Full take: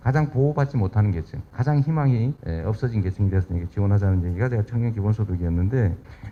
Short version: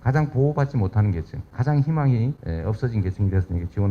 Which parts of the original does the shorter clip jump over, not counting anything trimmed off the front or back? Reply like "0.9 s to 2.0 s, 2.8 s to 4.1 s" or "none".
none